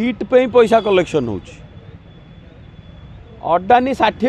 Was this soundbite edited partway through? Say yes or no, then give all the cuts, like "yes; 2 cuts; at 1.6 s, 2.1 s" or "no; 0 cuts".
no; 0 cuts